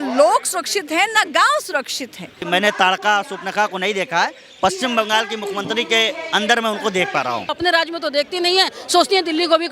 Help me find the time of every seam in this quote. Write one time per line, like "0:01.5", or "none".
0:02.5
0:07.5